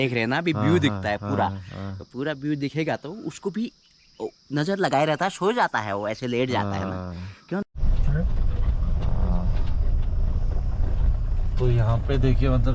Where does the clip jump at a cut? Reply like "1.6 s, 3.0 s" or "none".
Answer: 7.6 s